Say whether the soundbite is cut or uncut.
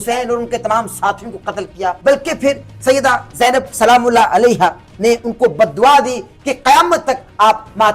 cut